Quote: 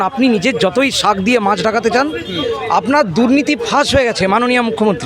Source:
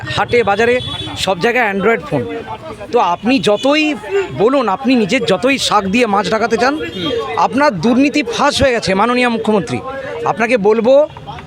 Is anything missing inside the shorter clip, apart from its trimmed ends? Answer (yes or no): no